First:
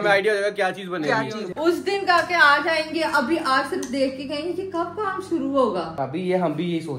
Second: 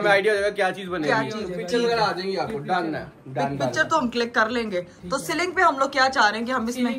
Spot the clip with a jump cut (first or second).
first